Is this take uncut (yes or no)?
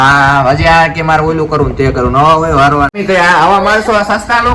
no